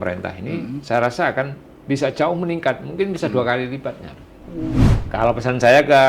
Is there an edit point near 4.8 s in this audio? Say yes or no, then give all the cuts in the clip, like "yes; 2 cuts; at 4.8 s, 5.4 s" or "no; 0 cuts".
yes; 1 cut; at 4.8 s